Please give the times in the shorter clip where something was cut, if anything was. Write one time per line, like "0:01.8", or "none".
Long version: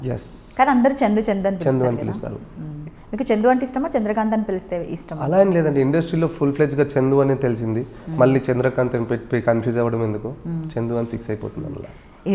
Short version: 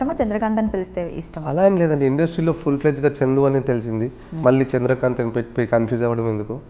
none